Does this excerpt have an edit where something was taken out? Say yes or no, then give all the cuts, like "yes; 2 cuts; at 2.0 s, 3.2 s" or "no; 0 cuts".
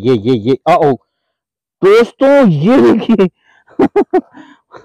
no; 0 cuts